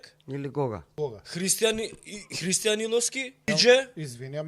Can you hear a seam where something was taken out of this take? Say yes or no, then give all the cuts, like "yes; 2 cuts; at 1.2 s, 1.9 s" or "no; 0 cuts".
yes; 2 cuts; at 0.9 s, 3.5 s